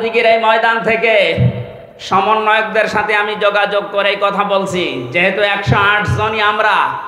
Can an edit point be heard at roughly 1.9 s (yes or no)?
no